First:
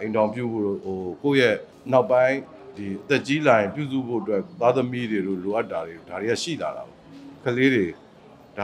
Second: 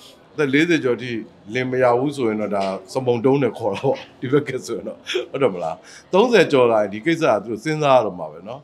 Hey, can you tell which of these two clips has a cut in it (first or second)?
first